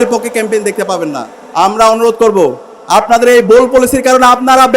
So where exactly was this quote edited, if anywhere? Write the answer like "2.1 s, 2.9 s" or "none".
1.3 s